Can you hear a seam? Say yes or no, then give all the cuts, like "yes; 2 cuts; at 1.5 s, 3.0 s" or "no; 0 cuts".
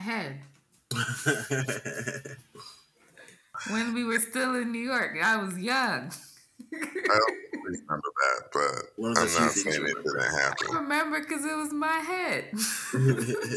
yes; 1 cut; at 3.5 s